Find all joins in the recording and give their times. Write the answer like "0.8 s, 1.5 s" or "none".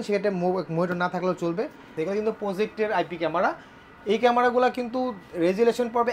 1.9 s